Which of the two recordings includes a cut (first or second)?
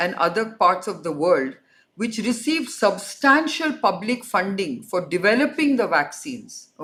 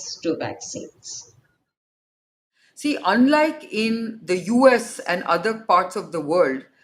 second